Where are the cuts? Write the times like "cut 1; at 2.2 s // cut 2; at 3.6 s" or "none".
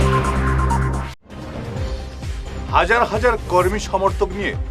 cut 1; at 2.1 s